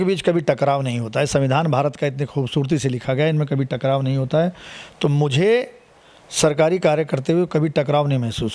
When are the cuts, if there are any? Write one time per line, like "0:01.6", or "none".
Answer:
none